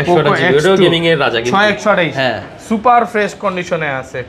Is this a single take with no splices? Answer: yes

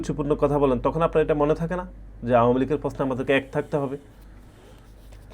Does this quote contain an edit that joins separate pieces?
no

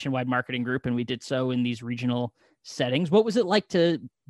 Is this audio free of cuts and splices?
yes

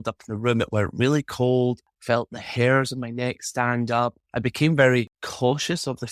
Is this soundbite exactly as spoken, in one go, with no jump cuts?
no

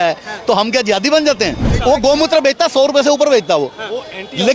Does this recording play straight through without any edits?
no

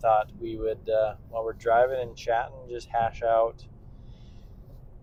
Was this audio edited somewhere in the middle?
no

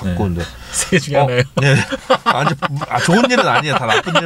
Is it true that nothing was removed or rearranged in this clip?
yes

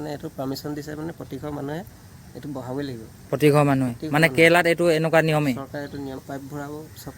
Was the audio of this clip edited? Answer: yes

